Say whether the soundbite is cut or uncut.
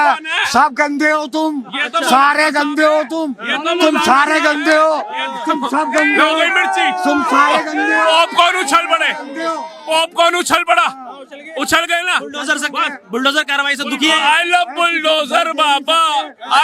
uncut